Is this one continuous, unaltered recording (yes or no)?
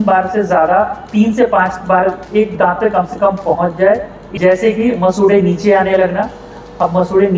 no